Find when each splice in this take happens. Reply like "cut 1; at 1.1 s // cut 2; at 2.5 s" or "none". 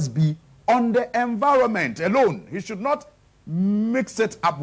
none